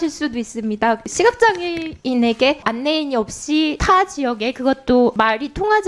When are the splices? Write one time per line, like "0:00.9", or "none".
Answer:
0:01.1
0:02.6
0:03.8
0:05.1

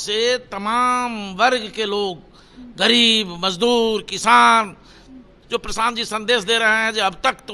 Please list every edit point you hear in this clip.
0:05.3

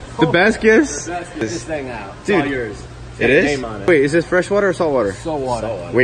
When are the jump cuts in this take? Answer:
0:01.4
0:03.9

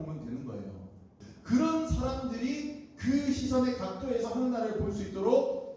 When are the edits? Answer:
0:01.2

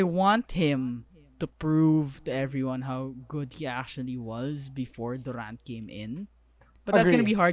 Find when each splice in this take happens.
none

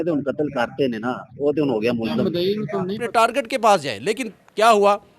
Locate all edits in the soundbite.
0:03.0

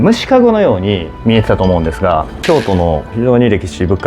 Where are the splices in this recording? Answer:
0:01.1
0:02.3

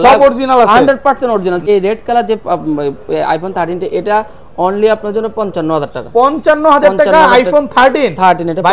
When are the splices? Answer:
0:01.6

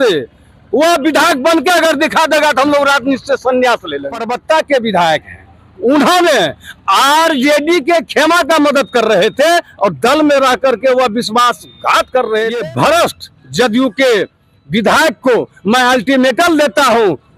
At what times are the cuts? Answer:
0:04.3
0:12.6

